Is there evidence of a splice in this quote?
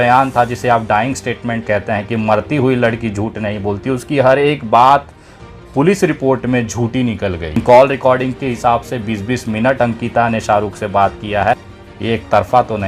yes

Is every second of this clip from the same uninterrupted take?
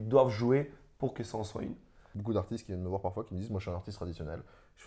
no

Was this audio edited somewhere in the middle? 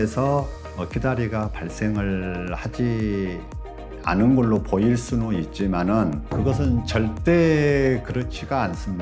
yes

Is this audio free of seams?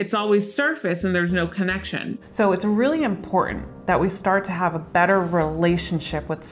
no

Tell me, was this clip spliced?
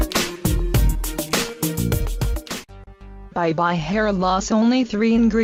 no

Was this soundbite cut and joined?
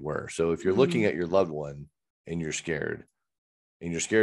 no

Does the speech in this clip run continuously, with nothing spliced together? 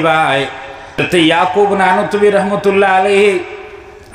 no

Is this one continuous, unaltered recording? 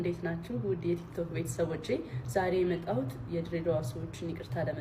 yes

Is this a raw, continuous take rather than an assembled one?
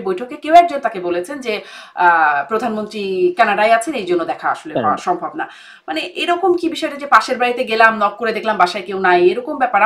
yes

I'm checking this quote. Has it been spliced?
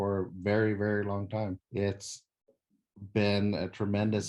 yes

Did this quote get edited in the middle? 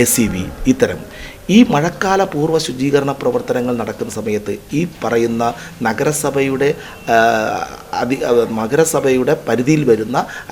no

